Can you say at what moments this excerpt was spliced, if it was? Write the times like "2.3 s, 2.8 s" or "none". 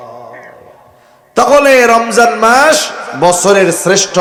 none